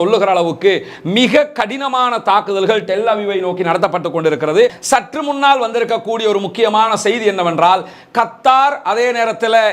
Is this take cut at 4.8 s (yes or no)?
yes